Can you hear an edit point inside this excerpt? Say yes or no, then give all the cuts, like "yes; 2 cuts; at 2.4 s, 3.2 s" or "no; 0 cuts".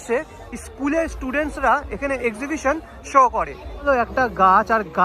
yes; 1 cut; at 3.8 s